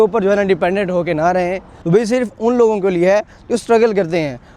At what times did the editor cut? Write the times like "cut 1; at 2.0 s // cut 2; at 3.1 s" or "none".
cut 1; at 1.8 s